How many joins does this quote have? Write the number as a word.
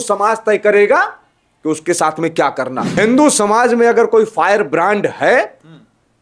one